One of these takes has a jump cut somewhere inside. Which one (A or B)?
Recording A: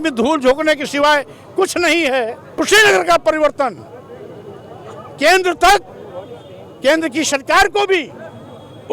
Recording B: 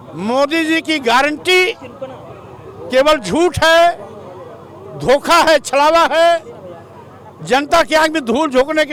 A